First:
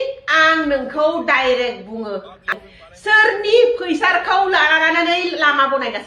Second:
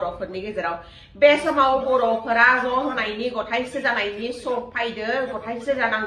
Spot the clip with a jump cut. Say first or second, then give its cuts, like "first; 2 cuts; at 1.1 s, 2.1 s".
first; 1 cut; at 2.4 s